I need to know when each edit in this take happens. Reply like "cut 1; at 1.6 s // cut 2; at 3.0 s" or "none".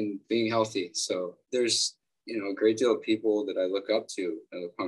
cut 1; at 1.4 s